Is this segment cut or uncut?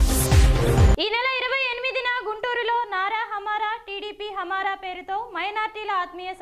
uncut